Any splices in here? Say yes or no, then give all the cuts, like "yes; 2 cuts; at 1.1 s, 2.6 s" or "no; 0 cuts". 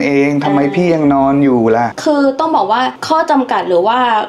yes; 2 cuts; at 2.0 s, 3.0 s